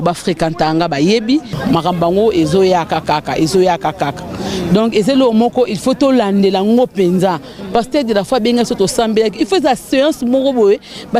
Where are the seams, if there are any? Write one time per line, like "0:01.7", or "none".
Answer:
0:01.5